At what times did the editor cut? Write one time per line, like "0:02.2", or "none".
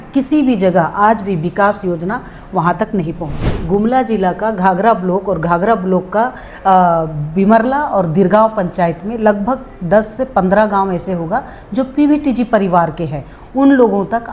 0:03.3